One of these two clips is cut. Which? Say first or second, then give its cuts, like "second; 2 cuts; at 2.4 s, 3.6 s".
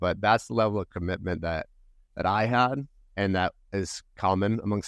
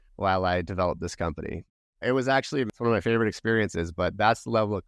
second; 2 cuts; at 1.7 s, 2.7 s